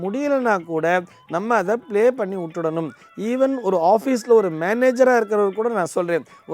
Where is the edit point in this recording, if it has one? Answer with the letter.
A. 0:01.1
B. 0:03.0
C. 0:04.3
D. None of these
D